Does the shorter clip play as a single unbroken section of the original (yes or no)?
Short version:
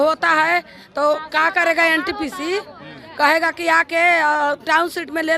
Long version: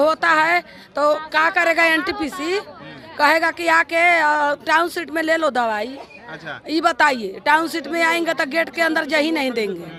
yes